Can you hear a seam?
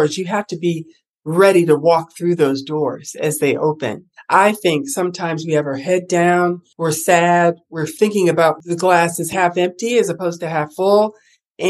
yes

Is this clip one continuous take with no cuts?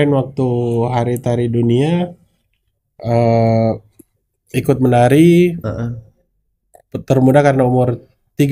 yes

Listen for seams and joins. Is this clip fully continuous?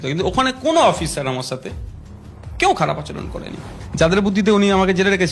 no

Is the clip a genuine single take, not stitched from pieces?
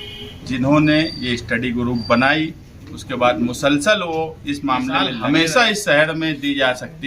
no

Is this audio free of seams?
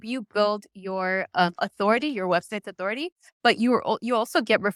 yes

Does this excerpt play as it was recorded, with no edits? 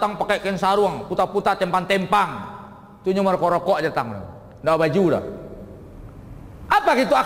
yes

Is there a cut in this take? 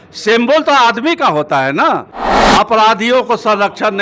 yes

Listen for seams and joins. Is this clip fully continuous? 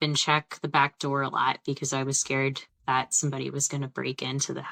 yes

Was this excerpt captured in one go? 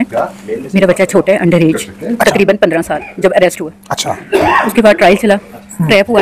yes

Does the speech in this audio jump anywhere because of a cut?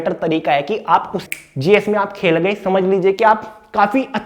yes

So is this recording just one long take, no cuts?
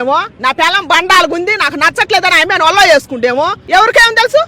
no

